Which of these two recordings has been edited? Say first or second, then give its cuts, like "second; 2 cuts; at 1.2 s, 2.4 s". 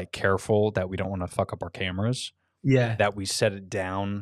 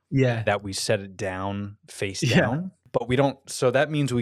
second; 1 cut; at 2.8 s